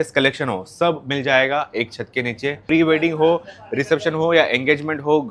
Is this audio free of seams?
no; 1 cut; at 2.6 s

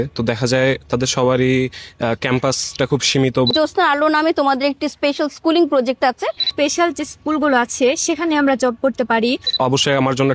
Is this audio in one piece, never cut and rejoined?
no; 3 cuts; at 3.5 s, 6.5 s, 9.5 s

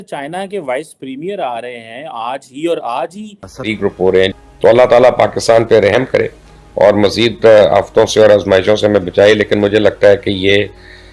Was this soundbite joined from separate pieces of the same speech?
yes; 1 cut; at 3.7 s

